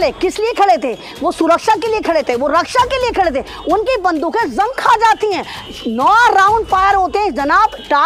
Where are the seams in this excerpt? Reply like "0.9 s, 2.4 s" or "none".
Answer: none